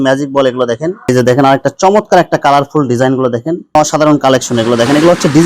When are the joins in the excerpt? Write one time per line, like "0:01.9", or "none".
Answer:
0:01.1
0:03.6